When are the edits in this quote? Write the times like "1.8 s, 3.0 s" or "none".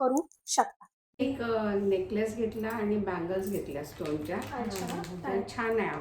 1.2 s